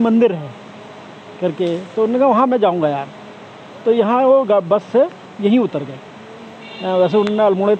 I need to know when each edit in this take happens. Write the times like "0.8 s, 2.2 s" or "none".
none